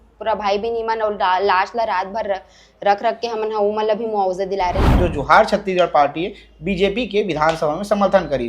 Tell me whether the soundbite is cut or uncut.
cut